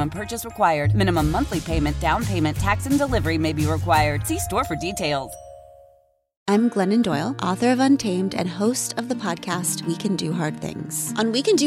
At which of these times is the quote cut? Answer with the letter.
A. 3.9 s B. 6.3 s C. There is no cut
B